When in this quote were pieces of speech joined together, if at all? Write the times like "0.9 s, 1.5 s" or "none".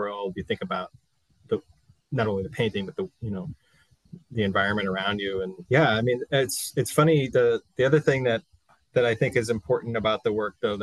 none